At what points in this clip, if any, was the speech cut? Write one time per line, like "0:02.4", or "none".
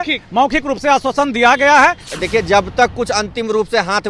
0:02.1